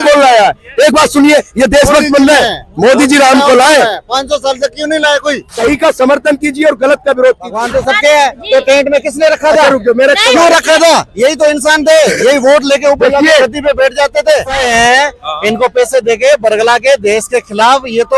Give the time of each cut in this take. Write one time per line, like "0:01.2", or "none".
0:05.4
0:07.5
0:14.6

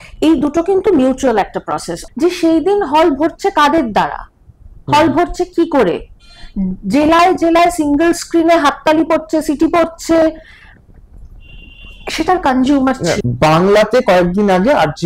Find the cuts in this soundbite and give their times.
0:01.9
0:13.2

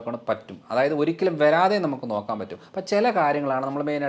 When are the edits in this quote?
none

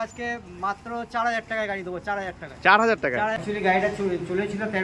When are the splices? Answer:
0:03.4

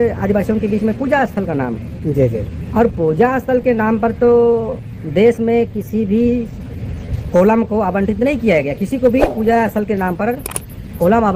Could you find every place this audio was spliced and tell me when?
none

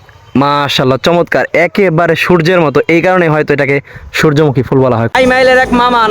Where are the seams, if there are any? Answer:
0:05.1

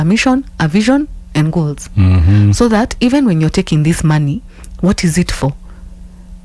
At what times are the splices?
none

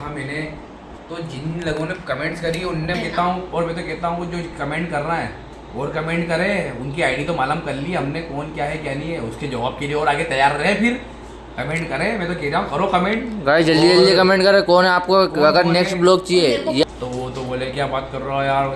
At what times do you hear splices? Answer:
0:02.9
0:17.0

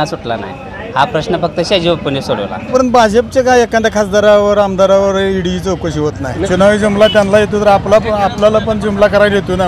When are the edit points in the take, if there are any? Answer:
0:02.7
0:06.5

